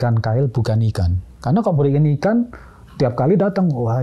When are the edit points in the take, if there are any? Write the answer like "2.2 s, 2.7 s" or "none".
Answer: 1.2 s